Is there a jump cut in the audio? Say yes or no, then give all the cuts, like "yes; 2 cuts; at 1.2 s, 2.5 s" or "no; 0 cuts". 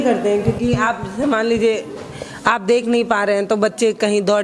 no; 0 cuts